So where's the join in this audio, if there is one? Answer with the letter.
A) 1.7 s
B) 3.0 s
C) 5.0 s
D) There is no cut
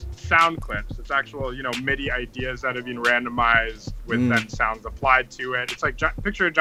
D